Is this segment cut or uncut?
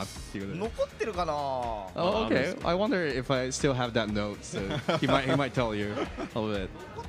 uncut